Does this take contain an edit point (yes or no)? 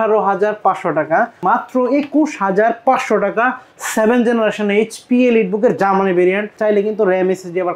yes